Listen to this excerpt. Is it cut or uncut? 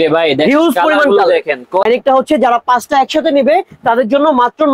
cut